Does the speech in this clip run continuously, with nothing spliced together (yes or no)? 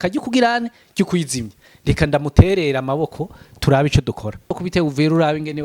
no